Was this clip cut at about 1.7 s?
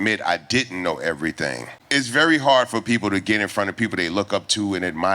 yes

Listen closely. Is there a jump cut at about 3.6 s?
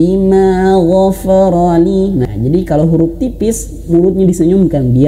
no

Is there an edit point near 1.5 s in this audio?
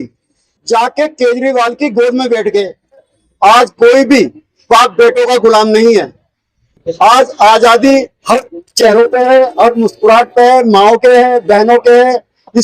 no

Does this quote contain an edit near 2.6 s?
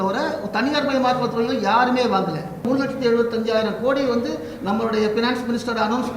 yes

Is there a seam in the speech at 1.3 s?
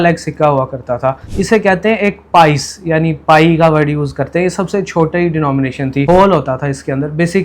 yes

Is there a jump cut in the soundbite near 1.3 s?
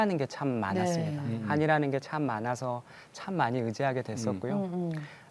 no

